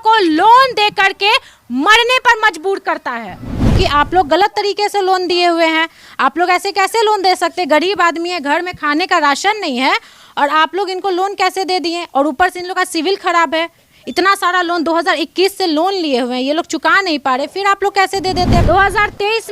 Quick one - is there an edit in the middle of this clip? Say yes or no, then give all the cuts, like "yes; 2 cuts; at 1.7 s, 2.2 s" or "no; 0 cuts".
yes; 2 cuts; at 3.7 s, 18.6 s